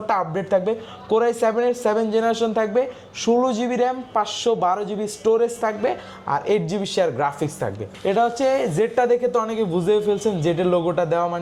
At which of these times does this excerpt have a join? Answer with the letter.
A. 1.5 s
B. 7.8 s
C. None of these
B